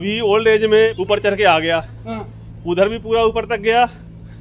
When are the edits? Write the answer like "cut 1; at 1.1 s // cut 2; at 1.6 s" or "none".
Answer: cut 1; at 1.0 s